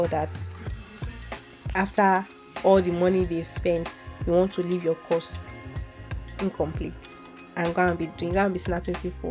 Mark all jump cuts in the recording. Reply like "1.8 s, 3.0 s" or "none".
none